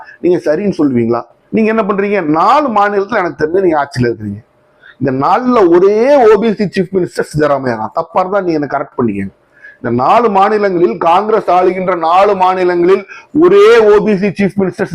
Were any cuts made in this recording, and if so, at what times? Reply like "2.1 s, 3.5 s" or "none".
1.3 s